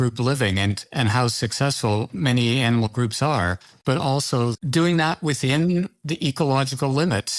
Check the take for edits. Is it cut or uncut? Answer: cut